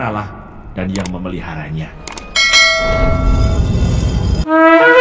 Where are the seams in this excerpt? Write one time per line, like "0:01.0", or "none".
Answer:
none